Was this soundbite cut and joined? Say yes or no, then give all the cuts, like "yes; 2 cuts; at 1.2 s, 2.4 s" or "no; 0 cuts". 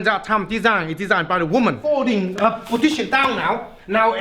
yes; 1 cut; at 1.9 s